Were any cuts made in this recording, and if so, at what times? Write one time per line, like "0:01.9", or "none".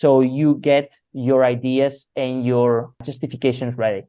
0:01.0
0:03.0